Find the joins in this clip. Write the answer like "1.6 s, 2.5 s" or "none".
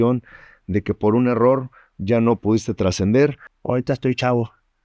3.5 s